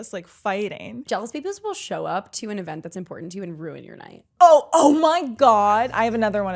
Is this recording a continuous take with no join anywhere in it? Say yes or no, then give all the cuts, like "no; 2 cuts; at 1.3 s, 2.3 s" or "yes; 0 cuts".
no; 2 cuts; at 1.0 s, 4.2 s